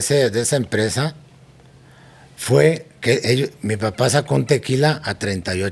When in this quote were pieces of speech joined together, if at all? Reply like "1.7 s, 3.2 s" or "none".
none

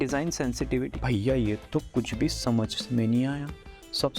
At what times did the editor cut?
1.0 s

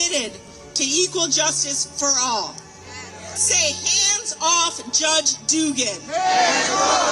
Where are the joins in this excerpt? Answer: 3.4 s

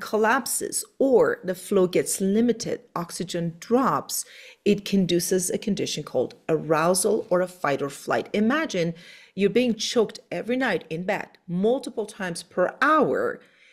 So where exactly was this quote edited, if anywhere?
none

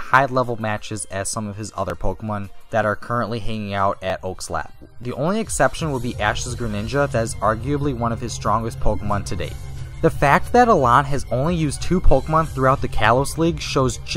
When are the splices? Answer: 2.5 s

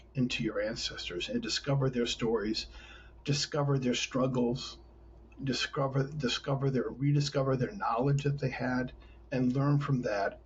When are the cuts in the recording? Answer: none

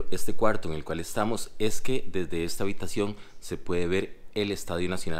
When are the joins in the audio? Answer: none

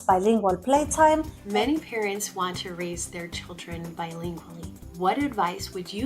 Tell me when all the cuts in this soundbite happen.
1.4 s, 4.8 s

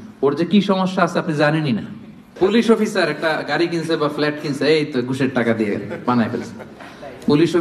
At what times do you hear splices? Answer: 2.3 s

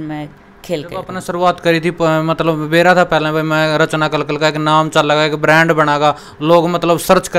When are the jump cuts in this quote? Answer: 1.1 s

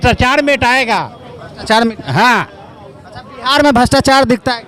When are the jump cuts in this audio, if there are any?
none

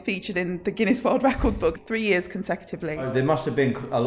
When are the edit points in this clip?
1.8 s, 3.1 s

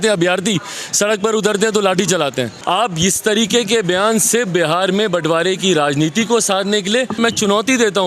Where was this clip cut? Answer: 2.6 s, 7.2 s

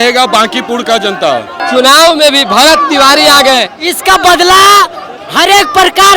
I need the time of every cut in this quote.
1.6 s

